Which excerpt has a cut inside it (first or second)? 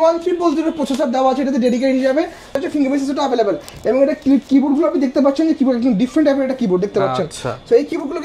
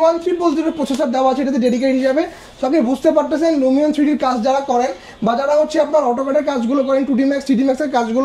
first